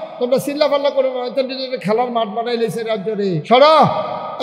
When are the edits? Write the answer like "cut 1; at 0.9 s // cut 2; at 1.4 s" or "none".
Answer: cut 1; at 3.4 s

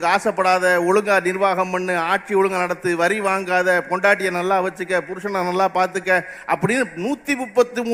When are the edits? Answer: none

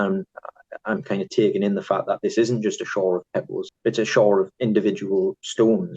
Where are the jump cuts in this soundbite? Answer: cut 1; at 3.6 s

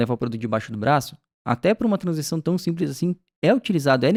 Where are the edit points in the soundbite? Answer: none

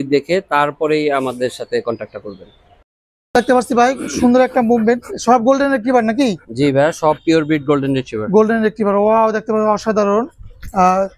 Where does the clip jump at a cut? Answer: none

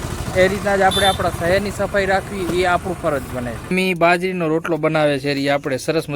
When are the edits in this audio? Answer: cut 1; at 3.7 s

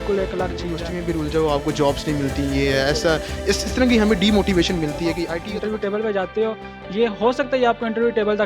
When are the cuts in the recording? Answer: cut 1; at 0.9 s // cut 2; at 5.4 s

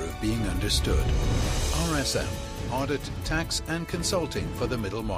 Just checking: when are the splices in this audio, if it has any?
none

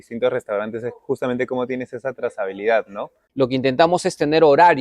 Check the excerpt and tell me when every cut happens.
cut 1; at 3.2 s

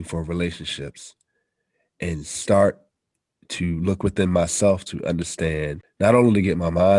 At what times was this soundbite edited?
cut 1; at 5.8 s

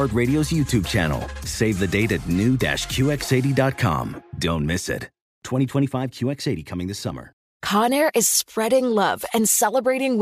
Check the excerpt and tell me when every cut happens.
cut 1; at 7.5 s

